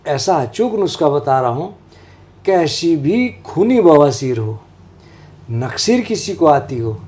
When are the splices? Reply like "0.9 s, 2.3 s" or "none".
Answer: none

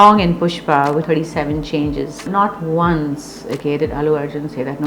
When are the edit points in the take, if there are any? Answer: 1.0 s, 2.3 s

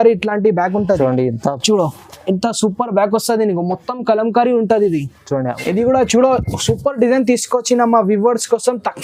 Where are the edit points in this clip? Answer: 5.5 s

